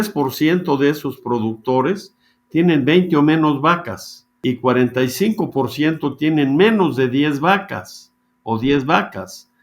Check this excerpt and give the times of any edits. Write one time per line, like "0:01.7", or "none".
0:04.4